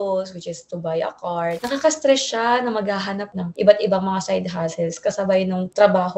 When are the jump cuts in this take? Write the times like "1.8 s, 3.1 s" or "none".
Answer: 1.6 s, 3.3 s